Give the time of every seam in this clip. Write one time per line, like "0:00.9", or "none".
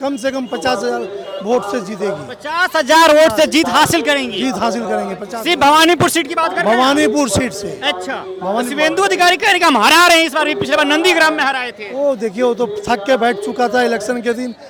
none